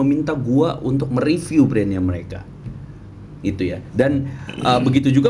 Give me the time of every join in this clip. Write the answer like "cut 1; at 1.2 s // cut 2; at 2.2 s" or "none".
none